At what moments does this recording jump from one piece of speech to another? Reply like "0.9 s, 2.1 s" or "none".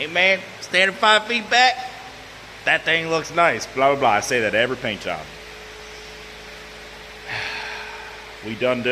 none